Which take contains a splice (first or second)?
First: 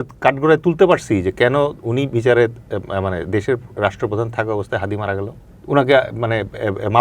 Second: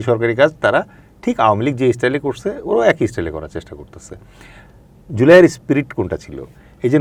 first